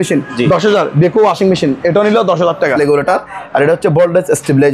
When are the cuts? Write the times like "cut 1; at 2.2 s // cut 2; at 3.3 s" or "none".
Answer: cut 1; at 2.7 s